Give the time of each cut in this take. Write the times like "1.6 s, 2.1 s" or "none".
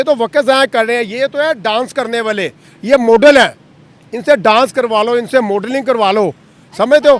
none